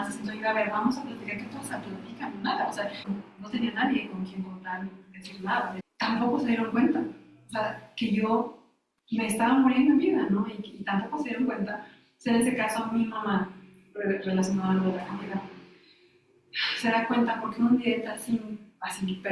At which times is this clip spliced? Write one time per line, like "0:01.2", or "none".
0:03.0
0:05.8